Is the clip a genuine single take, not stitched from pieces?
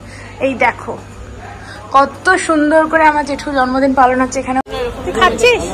no; 1 cut; at 4.6 s

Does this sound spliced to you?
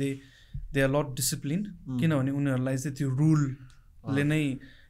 no; 0 cuts

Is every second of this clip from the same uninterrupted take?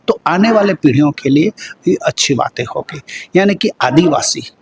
yes; 0 cuts

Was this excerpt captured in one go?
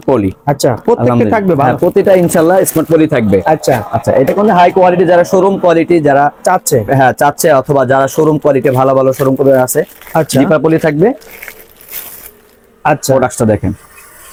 yes; 0 cuts

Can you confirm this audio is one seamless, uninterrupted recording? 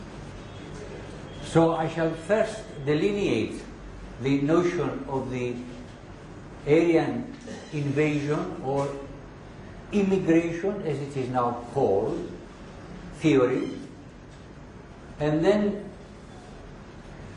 yes; 0 cuts

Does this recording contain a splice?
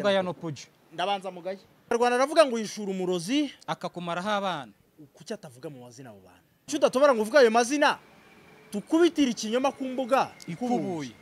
yes; 2 cuts; at 1.9 s, 6.6 s

